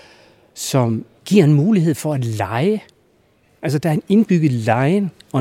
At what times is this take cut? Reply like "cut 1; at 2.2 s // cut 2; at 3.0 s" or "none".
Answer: cut 1; at 1.1 s